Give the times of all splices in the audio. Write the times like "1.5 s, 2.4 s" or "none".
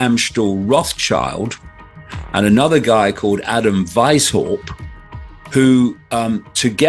none

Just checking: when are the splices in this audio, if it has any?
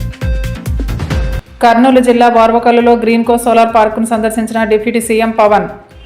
1.1 s

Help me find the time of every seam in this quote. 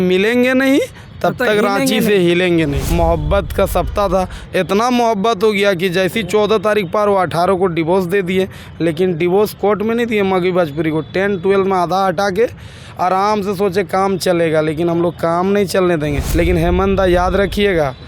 2.8 s, 16.2 s

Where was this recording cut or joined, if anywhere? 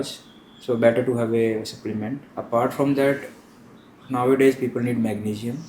2.3 s

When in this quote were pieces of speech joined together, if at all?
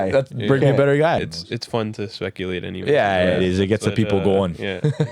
1.3 s

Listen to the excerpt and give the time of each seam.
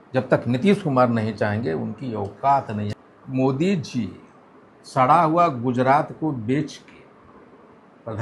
2.8 s

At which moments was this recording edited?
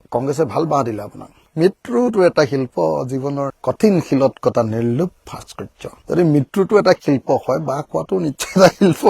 1.5 s

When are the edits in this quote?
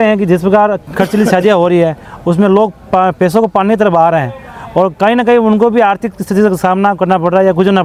none

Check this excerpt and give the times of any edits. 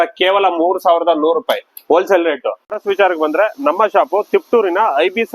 2.6 s

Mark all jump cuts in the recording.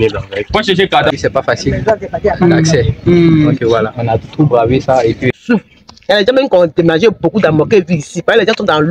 1.1 s, 5.2 s

